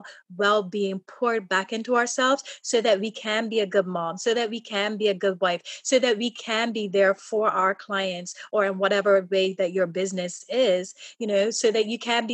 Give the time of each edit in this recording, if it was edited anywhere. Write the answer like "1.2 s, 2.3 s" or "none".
none